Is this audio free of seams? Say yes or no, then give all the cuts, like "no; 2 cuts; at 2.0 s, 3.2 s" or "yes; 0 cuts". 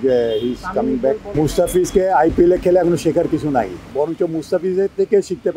no; 2 cuts; at 1.3 s, 3.9 s